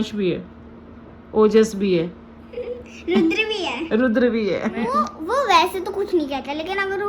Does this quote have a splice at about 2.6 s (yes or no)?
no